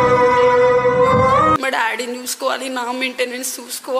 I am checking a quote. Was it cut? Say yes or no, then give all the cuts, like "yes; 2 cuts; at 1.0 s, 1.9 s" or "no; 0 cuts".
yes; 1 cut; at 1.6 s